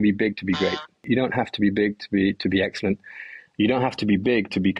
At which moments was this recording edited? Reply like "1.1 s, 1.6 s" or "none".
1.1 s